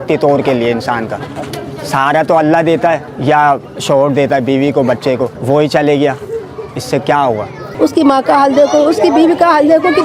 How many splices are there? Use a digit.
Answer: 3